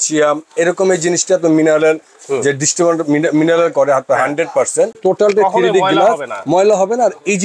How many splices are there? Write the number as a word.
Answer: one